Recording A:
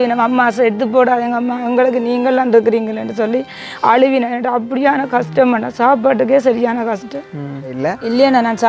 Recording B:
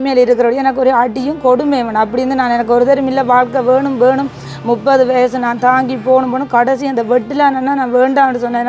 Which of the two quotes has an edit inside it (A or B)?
A